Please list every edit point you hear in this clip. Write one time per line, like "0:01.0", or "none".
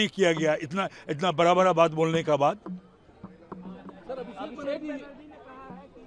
none